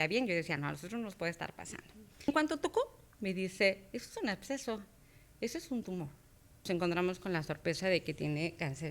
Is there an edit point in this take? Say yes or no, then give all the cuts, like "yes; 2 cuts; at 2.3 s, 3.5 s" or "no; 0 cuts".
yes; 2 cuts; at 2.3 s, 6.7 s